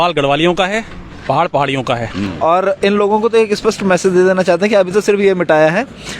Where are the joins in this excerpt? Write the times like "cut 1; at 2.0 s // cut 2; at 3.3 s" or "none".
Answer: cut 1; at 2.2 s